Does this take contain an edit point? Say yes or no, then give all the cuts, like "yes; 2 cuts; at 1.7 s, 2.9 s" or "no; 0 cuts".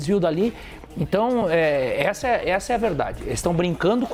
no; 0 cuts